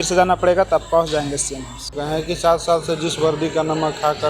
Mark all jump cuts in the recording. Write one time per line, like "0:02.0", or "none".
0:02.0